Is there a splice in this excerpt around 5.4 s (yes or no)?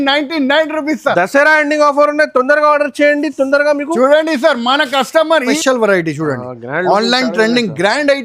yes